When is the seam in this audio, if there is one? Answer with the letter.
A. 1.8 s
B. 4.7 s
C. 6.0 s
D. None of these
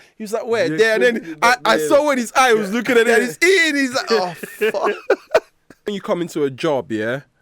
C